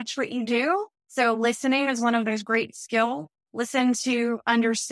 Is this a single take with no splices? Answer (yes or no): no